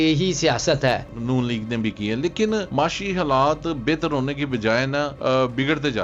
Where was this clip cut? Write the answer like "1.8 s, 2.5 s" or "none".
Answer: 1.1 s, 2.7 s, 5.1 s